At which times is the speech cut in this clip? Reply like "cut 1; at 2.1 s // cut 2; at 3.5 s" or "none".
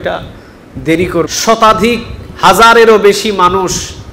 cut 1; at 1.3 s